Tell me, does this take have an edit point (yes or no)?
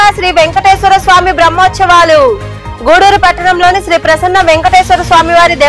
no